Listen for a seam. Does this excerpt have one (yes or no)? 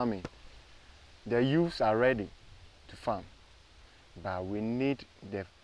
no